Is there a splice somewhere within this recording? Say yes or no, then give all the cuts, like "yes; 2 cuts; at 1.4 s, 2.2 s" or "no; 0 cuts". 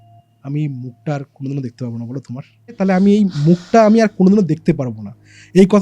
yes; 1 cut; at 2.8 s